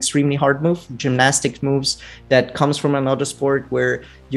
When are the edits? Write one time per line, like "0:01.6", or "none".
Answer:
0:00.9